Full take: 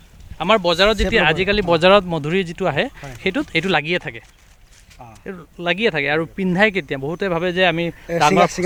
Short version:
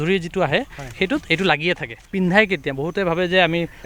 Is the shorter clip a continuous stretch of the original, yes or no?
no